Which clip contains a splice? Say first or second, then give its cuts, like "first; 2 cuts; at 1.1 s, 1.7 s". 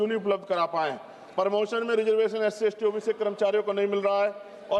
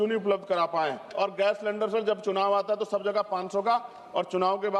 second; 1 cut; at 1.1 s